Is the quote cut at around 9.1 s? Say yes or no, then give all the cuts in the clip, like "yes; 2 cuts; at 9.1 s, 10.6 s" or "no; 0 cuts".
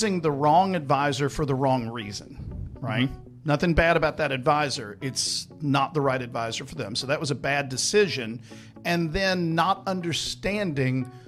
no; 0 cuts